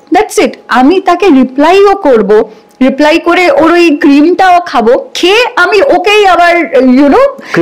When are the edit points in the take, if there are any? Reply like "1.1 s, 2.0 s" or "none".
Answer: none

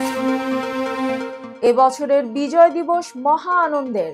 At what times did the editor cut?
1.4 s

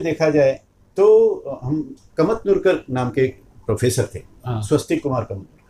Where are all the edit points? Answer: none

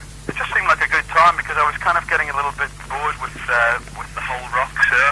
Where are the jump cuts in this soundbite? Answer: 3.8 s

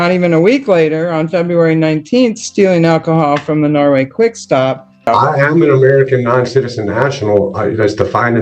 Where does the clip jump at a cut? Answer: 5.0 s

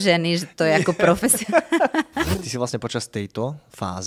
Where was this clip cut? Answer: 2.4 s

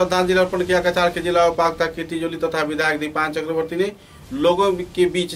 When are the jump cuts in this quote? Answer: none

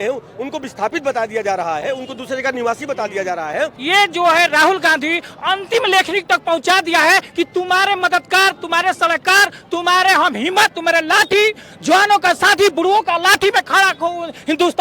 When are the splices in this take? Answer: 3.8 s

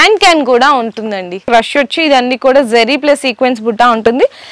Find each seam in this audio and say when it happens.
1.5 s

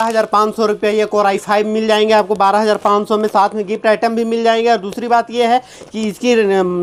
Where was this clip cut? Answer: none

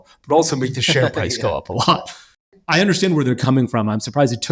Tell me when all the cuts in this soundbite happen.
2.5 s

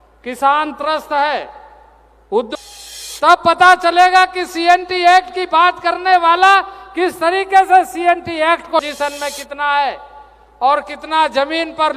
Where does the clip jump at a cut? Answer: 2.5 s, 8.8 s

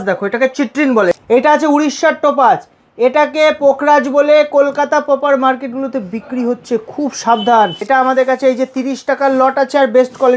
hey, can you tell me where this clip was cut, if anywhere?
1.1 s, 7.8 s

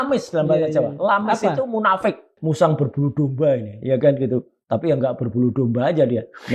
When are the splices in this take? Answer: 2.3 s

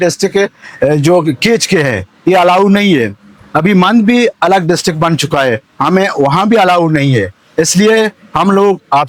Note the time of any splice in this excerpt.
none

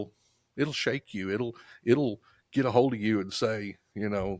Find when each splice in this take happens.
none

